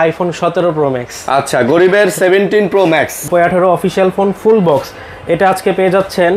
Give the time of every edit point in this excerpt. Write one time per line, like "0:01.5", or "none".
0:03.2